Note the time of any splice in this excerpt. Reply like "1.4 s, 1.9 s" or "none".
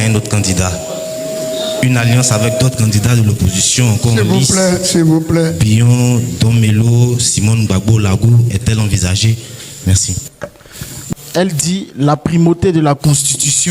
11.0 s